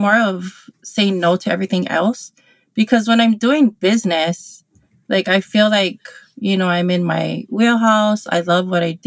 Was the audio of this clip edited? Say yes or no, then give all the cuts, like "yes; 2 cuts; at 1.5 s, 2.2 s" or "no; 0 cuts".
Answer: no; 0 cuts